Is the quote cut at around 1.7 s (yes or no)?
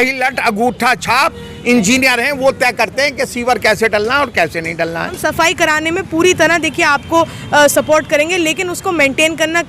no